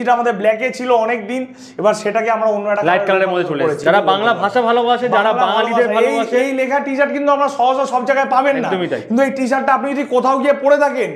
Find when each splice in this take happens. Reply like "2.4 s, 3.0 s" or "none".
3.8 s

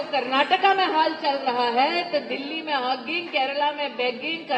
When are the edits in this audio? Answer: none

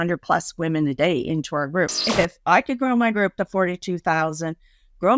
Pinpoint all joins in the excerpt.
2.0 s

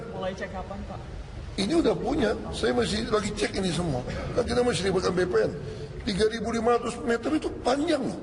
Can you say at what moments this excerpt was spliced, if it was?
3.3 s

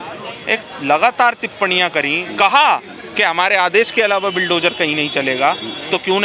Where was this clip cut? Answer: none

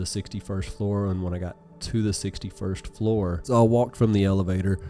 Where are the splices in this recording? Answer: 3.4 s

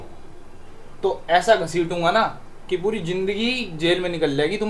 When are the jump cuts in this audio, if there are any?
none

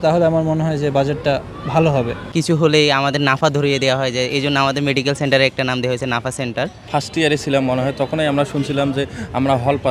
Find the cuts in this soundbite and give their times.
2.3 s, 6.9 s

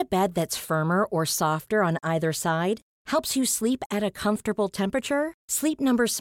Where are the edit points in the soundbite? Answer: none

